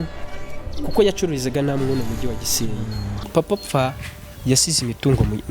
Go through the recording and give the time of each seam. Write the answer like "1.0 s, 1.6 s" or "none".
3.2 s